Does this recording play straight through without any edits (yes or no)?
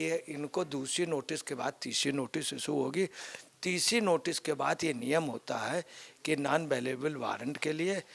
yes